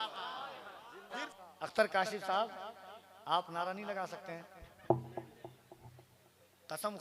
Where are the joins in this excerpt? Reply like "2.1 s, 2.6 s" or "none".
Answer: 1.2 s